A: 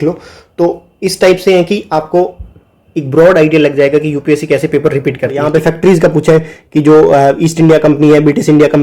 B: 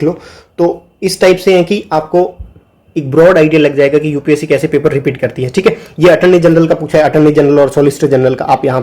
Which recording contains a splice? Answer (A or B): A